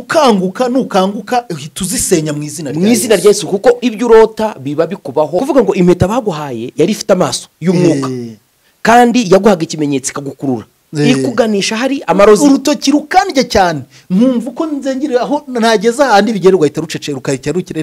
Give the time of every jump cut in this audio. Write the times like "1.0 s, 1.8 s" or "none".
5.4 s